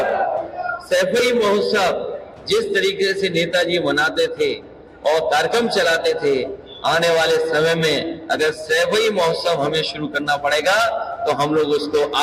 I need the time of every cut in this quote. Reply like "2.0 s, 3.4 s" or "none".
none

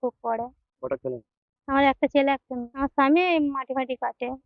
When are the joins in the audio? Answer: 2.6 s

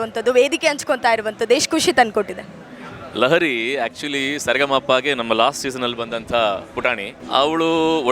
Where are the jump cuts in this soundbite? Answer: 7.1 s

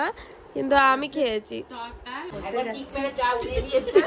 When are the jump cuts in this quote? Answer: 2.3 s

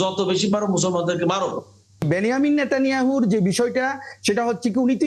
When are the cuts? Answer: 2.1 s

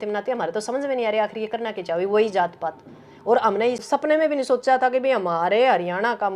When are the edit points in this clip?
3.8 s

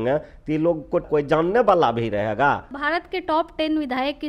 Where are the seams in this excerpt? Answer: 1.0 s, 2.7 s

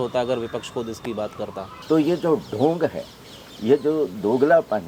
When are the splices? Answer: 1.7 s

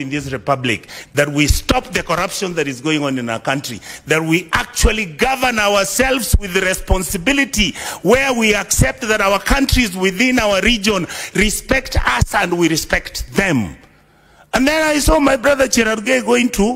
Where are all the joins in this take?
none

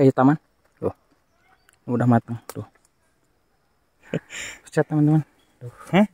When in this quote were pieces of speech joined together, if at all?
4.0 s

